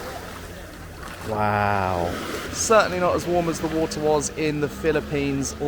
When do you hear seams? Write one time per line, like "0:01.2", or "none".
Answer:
0:02.5

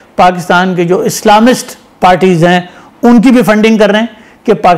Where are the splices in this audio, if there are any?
none

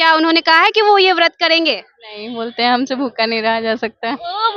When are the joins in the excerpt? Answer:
none

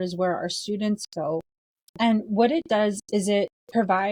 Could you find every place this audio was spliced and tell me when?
none

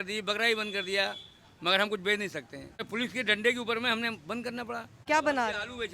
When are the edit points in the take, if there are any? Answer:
0:02.9
0:05.0

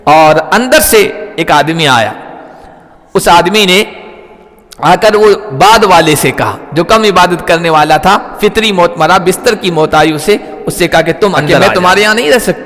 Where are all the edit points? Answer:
0:11.7

